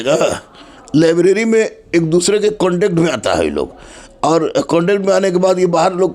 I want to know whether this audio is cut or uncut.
uncut